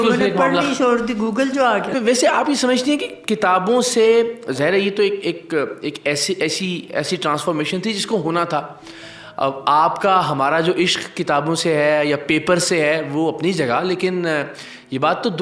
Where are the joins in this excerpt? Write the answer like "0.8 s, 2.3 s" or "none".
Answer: 1.9 s